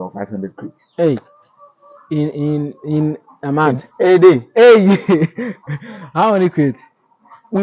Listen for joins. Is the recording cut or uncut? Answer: uncut